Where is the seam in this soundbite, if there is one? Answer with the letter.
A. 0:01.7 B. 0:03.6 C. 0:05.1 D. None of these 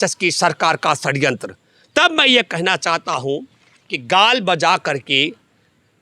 D